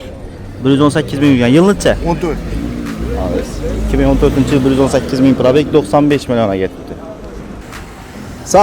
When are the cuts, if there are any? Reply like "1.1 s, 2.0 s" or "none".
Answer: 7.6 s